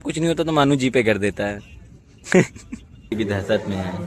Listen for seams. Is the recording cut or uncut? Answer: cut